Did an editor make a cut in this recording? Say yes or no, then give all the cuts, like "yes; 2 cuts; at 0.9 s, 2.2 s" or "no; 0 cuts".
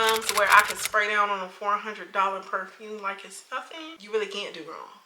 yes; 1 cut; at 4.0 s